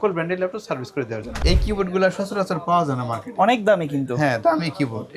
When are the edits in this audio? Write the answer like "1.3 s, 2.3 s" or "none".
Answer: 1.3 s